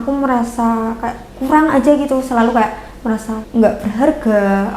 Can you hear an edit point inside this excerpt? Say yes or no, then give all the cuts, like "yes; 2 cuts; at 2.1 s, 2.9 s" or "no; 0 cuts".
yes; 1 cut; at 3.4 s